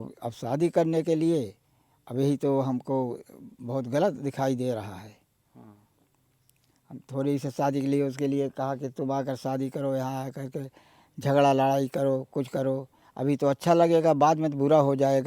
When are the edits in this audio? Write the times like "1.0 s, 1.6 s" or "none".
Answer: none